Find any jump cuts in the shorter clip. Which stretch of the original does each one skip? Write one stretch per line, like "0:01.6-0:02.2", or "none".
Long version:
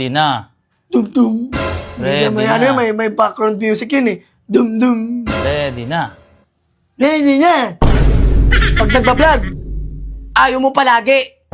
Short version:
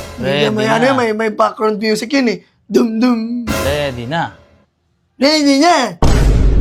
none

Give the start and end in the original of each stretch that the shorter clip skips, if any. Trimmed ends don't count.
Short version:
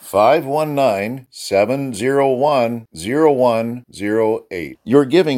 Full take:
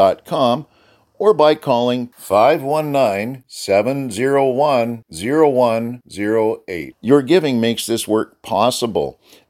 none

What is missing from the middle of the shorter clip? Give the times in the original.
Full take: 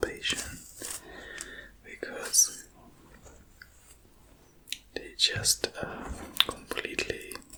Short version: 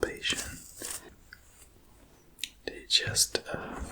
0:01.1-0:03.4

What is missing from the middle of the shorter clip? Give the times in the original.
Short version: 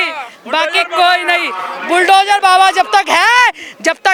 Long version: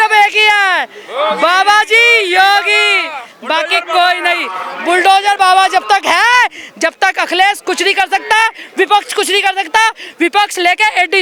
none

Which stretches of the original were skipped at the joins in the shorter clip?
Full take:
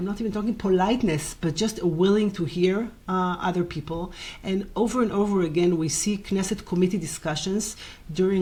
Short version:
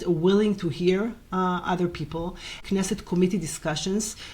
0:04.4-0:06.2

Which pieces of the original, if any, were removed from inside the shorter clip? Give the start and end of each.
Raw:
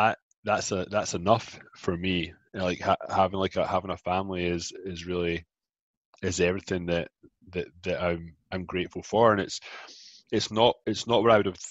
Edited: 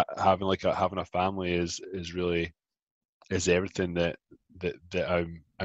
none

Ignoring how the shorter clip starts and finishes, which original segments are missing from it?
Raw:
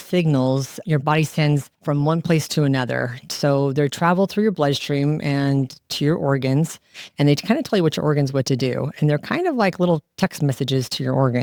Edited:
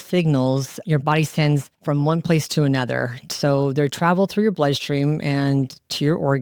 none

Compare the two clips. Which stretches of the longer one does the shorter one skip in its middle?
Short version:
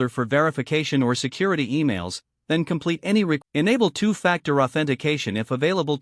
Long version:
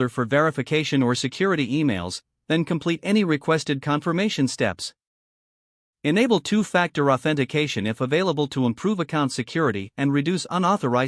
0:03.4-0:05.9

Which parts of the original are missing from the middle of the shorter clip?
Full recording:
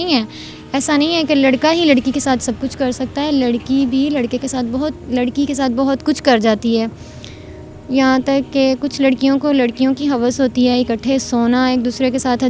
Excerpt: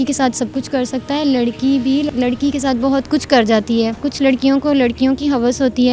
0:04.1-0:05.0
0:07.0-0:08.9

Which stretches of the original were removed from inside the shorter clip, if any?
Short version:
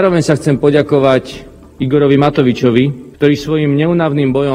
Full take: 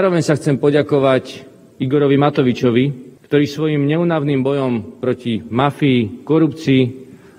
0:03.0-0:03.1

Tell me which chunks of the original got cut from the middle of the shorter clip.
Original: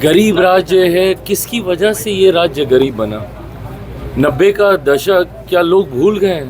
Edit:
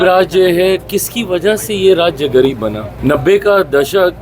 0:03.2-0:04.0

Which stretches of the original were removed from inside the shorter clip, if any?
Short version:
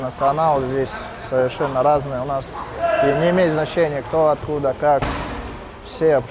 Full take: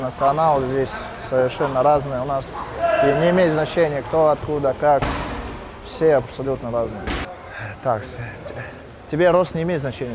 none

